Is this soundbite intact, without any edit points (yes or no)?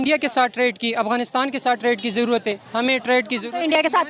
yes